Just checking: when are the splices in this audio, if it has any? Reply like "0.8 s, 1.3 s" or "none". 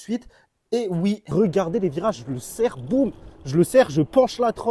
1.2 s